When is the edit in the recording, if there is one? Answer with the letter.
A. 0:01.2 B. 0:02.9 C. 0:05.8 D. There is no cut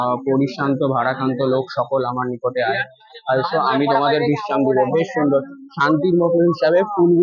D